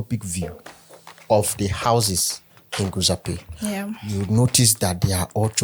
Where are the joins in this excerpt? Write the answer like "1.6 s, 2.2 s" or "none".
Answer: none